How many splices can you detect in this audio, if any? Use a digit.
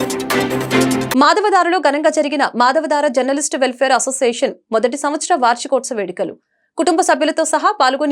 1